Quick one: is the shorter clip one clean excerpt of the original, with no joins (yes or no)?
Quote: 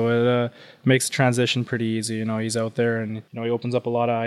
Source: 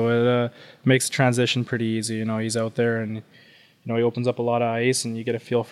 no